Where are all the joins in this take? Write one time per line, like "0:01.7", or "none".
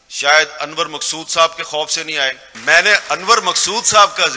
0:02.5